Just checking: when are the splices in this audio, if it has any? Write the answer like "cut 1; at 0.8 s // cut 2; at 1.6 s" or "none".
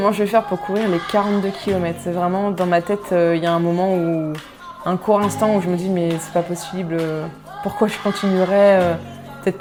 none